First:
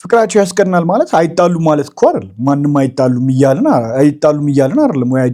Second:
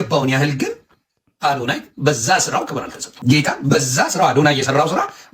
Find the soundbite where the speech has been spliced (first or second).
second